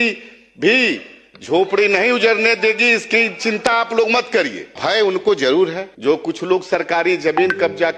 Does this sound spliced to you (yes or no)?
yes